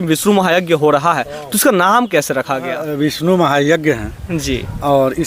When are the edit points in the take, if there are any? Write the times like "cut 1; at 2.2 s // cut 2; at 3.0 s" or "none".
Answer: cut 1; at 2.9 s

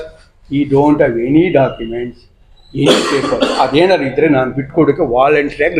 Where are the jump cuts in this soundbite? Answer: none

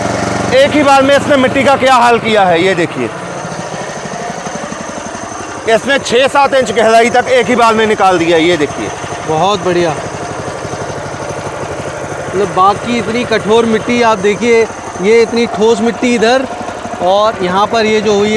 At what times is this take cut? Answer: none

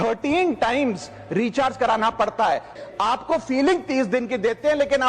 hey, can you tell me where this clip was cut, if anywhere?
cut 1; at 2.7 s

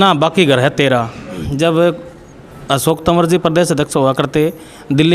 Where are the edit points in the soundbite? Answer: cut 1; at 1.5 s

